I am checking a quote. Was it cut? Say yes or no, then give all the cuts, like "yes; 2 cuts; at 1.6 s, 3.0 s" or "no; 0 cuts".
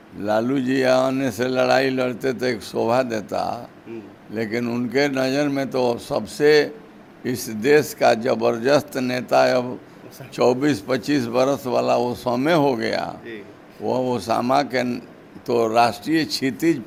no; 0 cuts